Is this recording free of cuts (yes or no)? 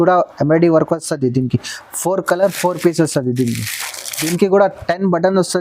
no